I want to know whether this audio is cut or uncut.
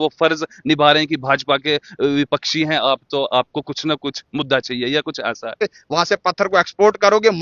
cut